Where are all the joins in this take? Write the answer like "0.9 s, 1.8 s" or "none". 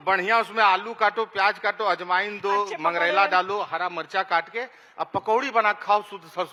none